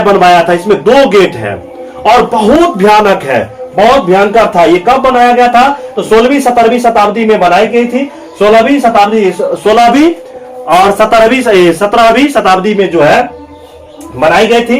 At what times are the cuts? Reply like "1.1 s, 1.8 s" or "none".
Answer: none